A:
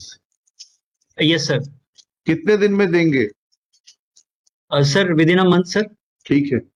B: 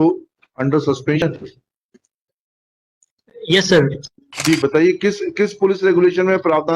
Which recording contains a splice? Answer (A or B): B